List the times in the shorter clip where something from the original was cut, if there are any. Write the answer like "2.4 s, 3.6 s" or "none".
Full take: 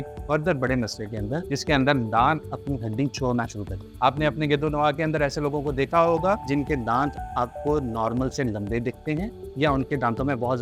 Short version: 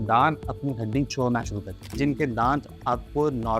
1.9 s